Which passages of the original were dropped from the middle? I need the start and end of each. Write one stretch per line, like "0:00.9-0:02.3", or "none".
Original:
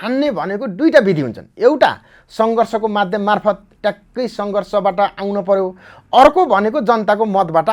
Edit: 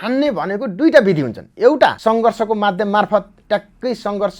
0:02.0-0:02.3